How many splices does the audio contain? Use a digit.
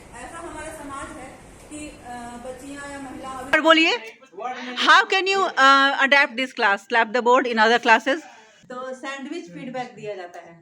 2